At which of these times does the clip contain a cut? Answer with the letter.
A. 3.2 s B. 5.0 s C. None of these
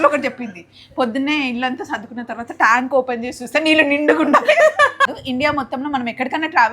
B